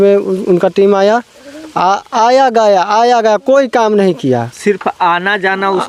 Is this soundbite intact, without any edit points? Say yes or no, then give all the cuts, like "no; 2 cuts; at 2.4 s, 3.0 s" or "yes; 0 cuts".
yes; 0 cuts